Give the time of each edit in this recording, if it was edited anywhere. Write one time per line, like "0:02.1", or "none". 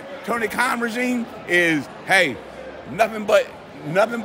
none